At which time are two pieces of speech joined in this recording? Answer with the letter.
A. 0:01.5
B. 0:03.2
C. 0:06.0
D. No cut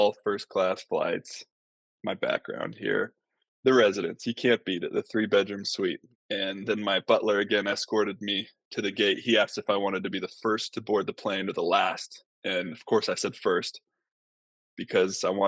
C